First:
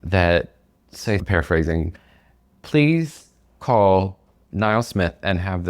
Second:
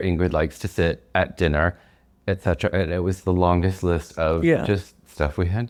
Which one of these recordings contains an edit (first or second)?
first